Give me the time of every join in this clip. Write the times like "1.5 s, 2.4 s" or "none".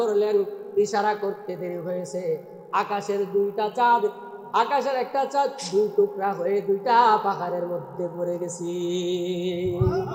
none